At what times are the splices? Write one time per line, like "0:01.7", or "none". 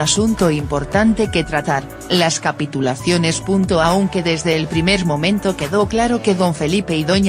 none